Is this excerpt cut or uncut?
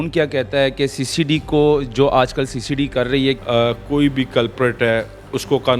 cut